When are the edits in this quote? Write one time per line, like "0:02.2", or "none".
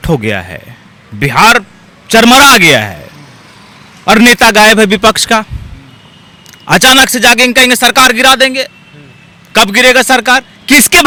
none